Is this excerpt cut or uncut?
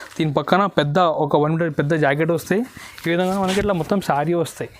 uncut